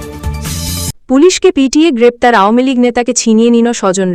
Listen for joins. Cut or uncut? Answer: cut